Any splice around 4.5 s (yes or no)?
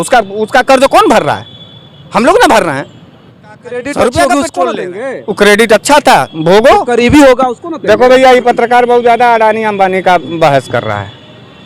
yes